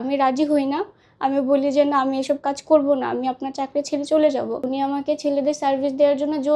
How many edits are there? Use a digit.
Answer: 1